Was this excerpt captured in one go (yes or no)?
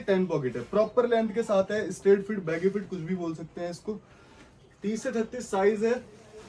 yes